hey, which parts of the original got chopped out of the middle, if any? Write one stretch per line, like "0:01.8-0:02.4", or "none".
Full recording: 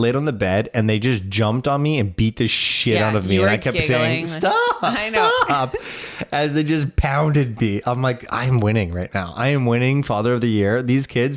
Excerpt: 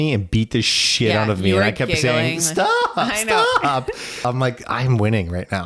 0:06.0-0:07.8